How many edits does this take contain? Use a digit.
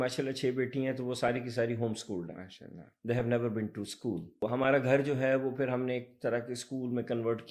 1